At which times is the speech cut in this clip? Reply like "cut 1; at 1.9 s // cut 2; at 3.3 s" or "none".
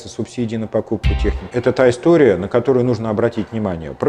cut 1; at 1.5 s